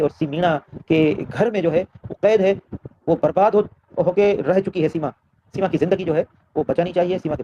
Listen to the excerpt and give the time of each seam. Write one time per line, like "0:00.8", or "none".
none